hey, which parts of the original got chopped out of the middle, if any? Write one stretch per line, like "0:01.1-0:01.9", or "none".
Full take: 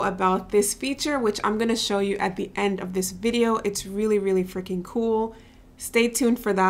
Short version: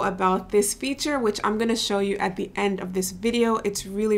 none